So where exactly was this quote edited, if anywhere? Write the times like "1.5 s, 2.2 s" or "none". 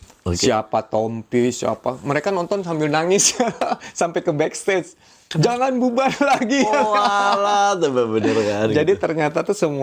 none